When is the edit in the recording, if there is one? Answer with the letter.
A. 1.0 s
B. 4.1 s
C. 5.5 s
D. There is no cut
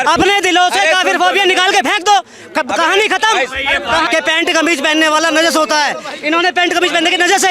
B